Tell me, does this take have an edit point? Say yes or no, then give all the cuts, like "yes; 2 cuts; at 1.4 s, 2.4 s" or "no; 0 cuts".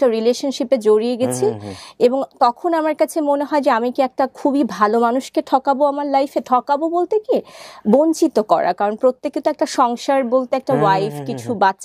no; 0 cuts